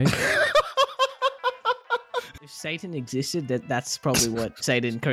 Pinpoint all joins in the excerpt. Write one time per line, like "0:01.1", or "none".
0:02.4